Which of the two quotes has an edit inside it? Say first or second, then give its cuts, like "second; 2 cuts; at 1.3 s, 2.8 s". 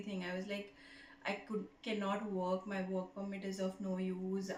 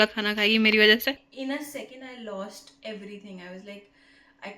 second; 1 cut; at 1.3 s